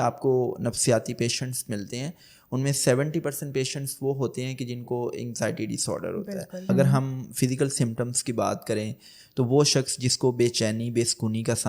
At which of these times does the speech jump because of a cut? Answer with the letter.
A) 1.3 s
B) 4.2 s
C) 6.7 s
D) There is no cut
C